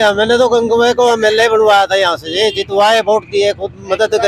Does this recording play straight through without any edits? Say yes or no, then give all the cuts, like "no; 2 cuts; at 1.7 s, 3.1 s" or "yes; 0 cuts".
yes; 0 cuts